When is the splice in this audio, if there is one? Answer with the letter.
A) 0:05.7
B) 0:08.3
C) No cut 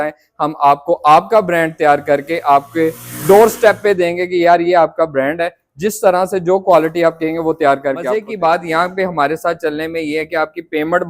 B